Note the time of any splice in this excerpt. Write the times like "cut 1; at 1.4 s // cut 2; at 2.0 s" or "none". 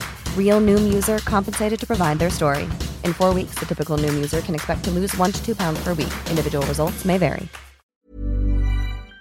cut 1; at 7.8 s